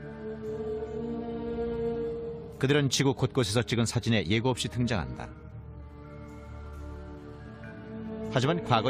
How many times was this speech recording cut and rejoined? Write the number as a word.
one